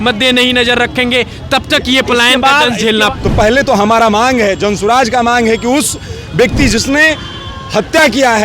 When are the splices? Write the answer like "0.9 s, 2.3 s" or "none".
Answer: 3.1 s